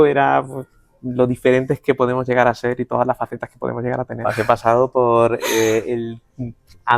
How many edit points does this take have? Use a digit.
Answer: 1